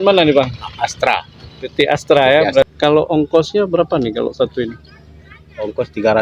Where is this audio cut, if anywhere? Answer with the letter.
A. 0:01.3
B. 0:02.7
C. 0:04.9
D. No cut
B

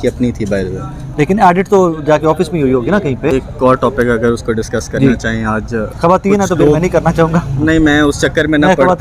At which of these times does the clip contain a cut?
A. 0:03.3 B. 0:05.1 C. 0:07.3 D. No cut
A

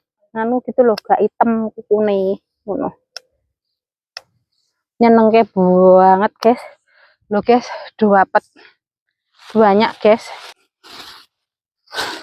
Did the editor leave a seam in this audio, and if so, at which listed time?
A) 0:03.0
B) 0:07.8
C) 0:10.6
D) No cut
C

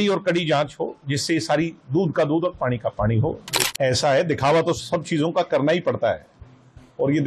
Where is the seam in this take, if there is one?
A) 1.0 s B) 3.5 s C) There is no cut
B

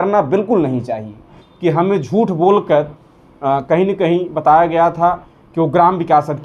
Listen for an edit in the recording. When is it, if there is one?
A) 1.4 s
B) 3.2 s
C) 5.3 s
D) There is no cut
A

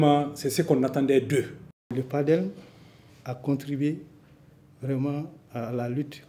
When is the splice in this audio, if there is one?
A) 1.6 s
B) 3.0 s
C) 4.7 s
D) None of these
A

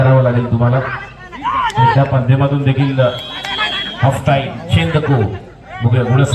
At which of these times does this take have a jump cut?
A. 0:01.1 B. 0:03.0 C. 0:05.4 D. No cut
D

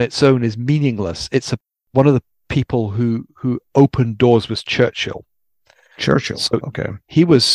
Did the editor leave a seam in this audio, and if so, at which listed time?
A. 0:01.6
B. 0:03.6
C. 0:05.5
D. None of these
A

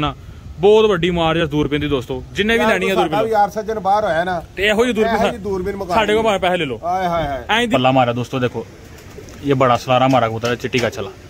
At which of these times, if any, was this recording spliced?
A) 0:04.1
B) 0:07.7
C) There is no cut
B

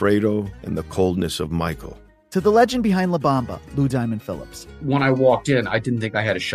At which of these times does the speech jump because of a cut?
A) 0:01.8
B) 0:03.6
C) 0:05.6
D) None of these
A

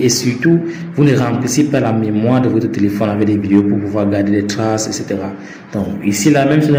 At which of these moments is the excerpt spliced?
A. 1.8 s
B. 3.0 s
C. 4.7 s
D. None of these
D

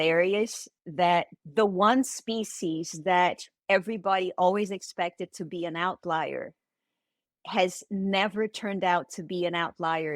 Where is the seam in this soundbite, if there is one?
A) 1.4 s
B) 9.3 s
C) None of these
A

